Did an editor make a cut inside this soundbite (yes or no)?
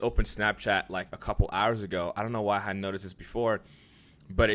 no